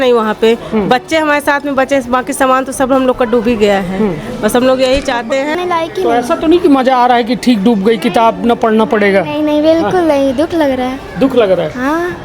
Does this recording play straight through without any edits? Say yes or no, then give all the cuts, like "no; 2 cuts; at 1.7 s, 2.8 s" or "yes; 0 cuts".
no; 1 cut; at 5.5 s